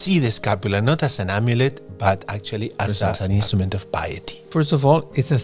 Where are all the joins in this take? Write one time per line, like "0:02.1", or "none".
0:03.2
0:04.4